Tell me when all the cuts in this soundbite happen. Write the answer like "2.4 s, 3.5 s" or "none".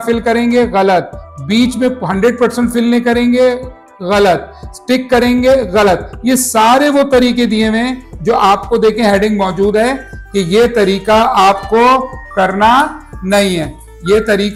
none